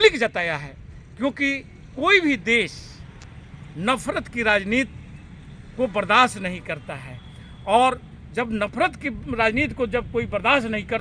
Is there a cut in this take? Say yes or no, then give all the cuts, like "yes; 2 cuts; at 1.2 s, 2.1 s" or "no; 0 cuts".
no; 0 cuts